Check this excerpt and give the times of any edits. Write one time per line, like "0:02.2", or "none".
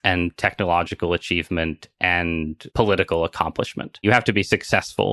0:02.6
0:04.0